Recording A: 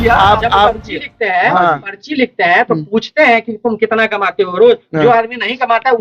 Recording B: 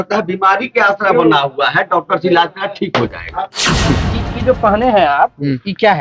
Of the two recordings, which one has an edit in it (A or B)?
B